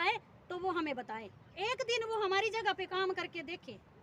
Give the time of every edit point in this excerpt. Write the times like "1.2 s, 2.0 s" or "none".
none